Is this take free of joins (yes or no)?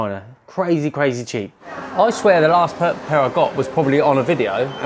no